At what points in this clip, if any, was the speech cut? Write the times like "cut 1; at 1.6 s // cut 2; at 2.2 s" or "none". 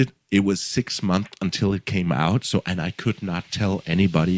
none